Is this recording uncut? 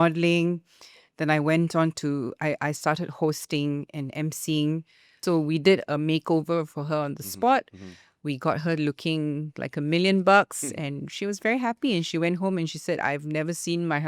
no; 1 cut; at 5.2 s

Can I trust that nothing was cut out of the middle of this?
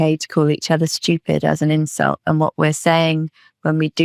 yes; 0 cuts

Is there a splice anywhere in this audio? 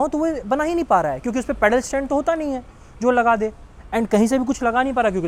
no; 0 cuts

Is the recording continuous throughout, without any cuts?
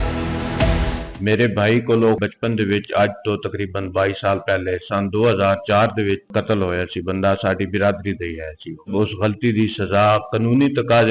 no; 4 cuts; at 1.0 s, 2.2 s, 6.3 s, 8.9 s

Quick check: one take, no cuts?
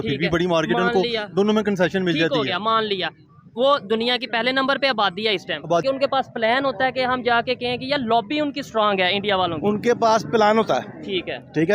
no; 1 cut; at 5.8 s

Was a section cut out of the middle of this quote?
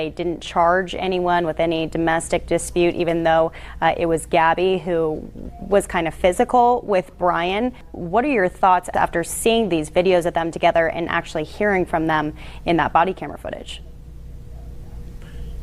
yes; 2 cuts; at 7.9 s, 8.9 s

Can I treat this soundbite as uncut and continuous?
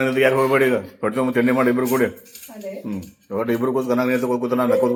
yes; 0 cuts

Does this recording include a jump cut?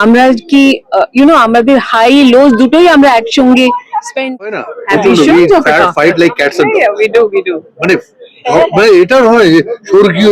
yes; 1 cut; at 4.5 s

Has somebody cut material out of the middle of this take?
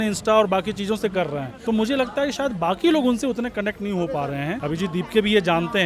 yes; 2 cuts; at 1.5 s, 4.6 s

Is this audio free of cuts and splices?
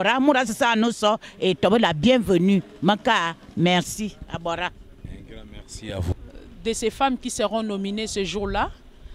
no; 1 cut; at 6.2 s

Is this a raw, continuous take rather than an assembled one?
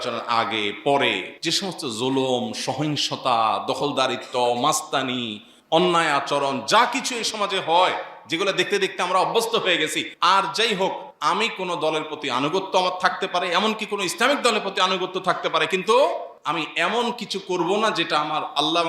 no; 4 cuts; at 1.3 s, 10.1 s, 11.1 s, 16.3 s

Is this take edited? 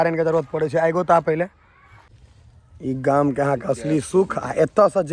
yes; 1 cut; at 2.2 s

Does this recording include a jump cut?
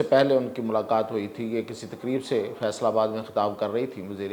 no; 0 cuts

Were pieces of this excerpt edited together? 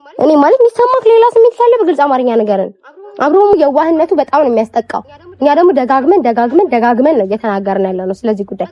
yes; 1 cut; at 3.5 s

